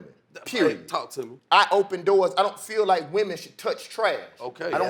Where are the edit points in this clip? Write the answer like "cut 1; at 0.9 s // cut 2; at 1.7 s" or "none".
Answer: cut 1; at 1.3 s